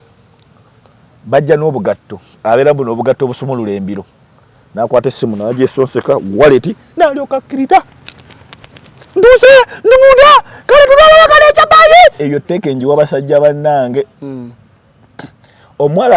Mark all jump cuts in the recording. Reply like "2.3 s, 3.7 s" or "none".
12.2 s